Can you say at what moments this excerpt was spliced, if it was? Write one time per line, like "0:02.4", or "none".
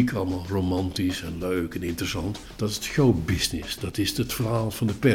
0:02.4